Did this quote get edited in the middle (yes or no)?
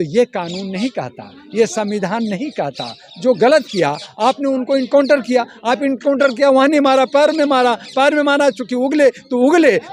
no